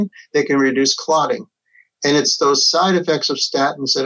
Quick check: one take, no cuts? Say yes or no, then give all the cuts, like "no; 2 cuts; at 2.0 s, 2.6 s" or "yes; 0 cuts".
yes; 0 cuts